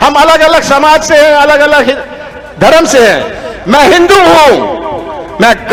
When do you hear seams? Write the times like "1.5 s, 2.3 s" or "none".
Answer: none